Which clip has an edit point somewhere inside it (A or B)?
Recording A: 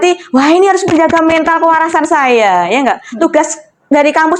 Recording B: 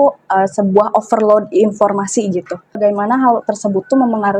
B